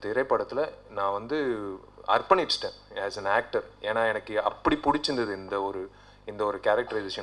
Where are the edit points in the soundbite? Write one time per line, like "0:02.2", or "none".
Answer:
none